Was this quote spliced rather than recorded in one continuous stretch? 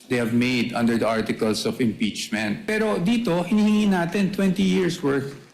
yes; 1 cut; at 2.6 s

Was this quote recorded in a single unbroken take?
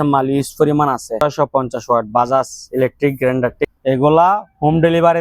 no; 2 cuts; at 1.2 s, 3.6 s

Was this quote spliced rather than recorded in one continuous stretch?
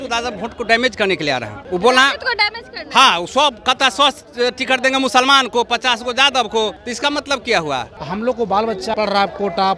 yes; 4 cuts; at 1.5 s, 6.8 s, 8.0 s, 8.9 s

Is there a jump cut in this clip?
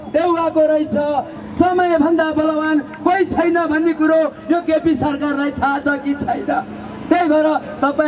yes; 1 cut; at 1.4 s

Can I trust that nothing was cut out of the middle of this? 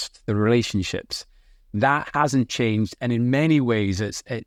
yes; 0 cuts

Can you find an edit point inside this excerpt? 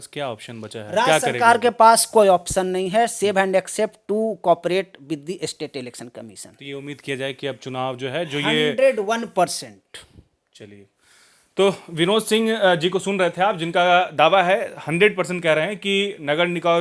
no; 0 cuts

